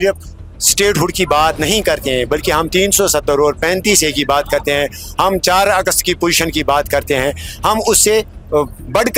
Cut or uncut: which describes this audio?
uncut